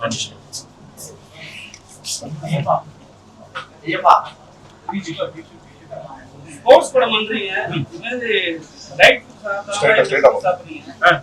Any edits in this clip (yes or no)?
no